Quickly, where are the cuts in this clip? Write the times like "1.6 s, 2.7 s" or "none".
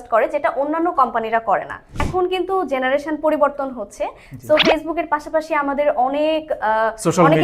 2.1 s

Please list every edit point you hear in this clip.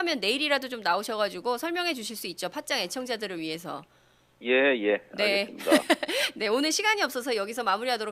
none

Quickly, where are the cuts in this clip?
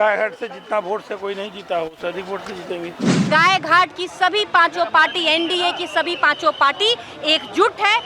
3.3 s

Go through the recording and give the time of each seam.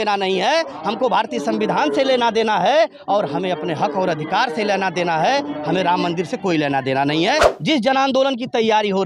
7.5 s

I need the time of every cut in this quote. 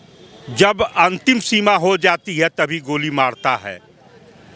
none

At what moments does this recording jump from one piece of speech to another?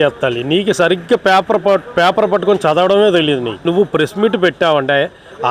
3.6 s

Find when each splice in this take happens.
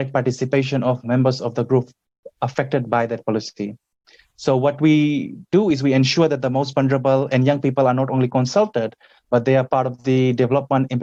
none

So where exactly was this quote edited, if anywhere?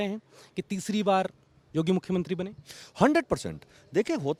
none

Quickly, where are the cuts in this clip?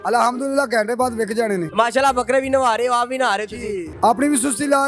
1.7 s, 3.9 s

